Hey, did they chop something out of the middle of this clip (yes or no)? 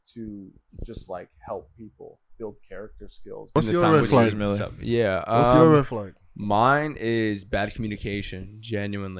yes